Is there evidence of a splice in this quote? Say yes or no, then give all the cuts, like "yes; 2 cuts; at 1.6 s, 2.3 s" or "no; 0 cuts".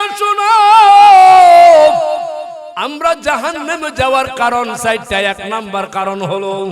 no; 0 cuts